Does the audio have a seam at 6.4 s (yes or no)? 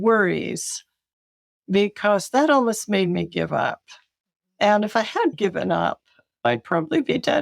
yes